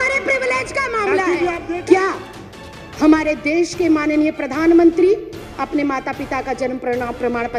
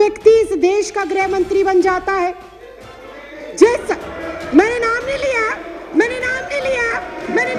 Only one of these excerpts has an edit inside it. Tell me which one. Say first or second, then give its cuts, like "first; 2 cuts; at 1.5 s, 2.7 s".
first; 1 cut; at 1.7 s